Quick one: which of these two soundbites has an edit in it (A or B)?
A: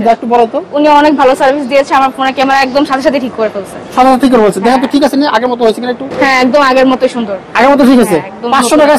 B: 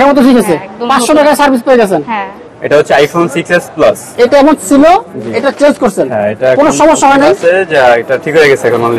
B